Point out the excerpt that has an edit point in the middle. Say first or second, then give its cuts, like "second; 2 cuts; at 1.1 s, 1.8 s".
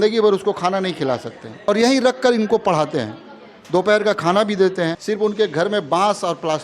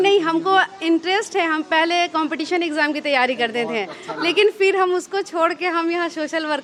first; 2 cuts; at 1.6 s, 5.0 s